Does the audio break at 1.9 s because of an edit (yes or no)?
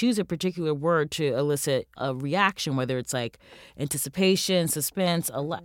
yes